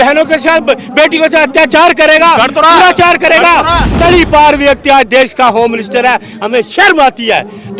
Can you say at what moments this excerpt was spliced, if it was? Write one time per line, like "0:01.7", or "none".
0:03.8